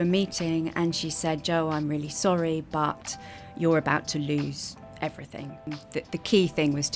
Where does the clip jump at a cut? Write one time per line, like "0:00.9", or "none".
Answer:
0:05.8